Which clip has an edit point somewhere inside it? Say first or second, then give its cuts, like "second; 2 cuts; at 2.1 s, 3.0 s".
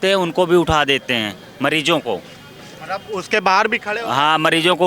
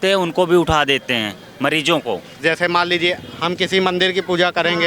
second; 1 cut; at 2.4 s